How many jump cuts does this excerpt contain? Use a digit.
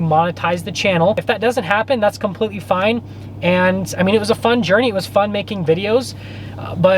1